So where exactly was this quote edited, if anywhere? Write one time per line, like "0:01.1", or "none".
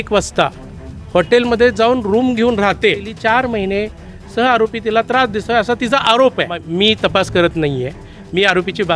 0:03.1
0:06.6